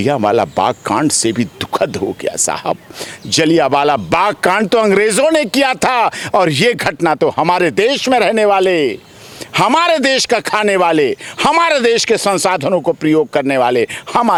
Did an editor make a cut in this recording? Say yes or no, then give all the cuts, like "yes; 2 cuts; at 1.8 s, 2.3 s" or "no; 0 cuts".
no; 0 cuts